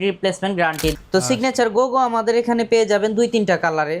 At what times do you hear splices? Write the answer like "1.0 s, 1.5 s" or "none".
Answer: 1.0 s